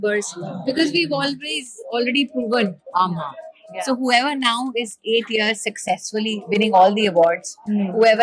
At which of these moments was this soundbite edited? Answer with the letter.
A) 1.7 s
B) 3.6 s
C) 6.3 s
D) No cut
D